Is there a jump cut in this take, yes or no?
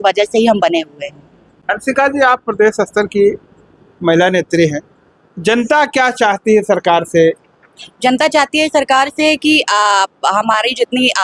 no